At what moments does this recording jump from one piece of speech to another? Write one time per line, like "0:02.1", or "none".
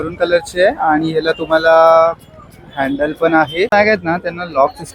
0:03.7